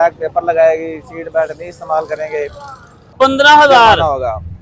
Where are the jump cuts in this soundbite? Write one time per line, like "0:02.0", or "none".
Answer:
0:03.1

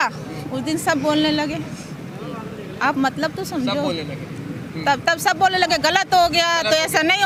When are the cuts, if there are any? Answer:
none

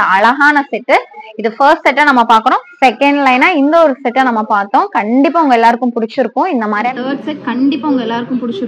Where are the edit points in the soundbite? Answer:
0:02.8
0:06.9

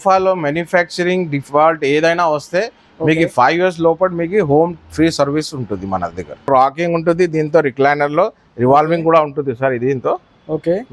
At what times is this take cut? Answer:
0:06.4

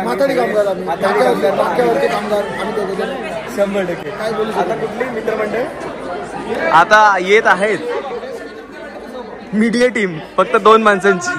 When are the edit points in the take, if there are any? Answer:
none

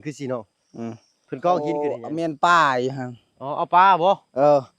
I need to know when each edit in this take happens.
0:02.0

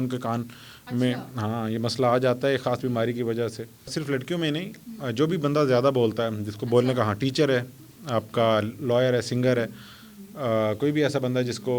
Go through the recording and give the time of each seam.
0:03.9

